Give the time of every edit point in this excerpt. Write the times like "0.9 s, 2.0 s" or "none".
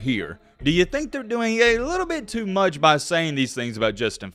none